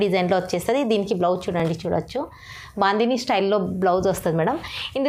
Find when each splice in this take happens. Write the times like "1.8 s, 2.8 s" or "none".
none